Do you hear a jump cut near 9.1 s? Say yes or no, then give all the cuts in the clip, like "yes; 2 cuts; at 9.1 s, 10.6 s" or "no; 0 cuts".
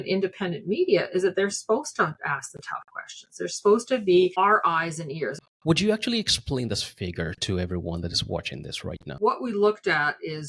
yes; 2 cuts; at 5.4 s, 9.1 s